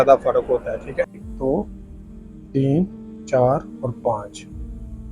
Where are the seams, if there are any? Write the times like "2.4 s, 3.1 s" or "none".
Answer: 1.2 s